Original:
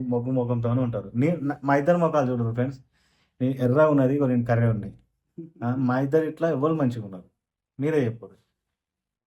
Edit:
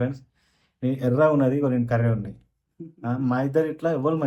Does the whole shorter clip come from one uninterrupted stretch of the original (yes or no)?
yes